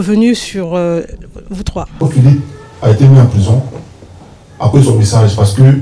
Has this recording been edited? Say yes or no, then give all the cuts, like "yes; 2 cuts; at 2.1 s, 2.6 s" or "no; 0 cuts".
yes; 1 cut; at 2.0 s